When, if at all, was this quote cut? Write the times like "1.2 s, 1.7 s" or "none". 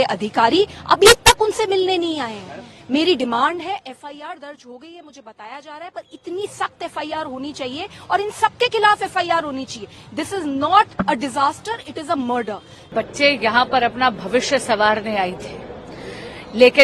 12.9 s